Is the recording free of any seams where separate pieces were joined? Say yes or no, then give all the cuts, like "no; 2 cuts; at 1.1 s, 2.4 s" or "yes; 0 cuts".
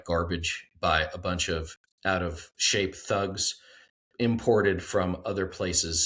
no; 1 cut; at 1.7 s